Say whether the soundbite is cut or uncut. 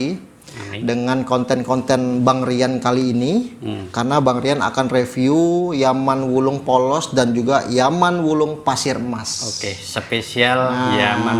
uncut